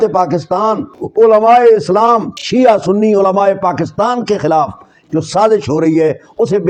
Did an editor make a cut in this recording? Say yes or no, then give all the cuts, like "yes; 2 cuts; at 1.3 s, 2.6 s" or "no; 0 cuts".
no; 0 cuts